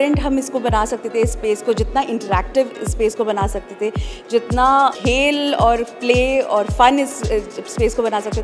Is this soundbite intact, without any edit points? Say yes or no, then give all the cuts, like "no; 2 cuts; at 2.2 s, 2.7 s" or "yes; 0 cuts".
no; 1 cut; at 4.9 s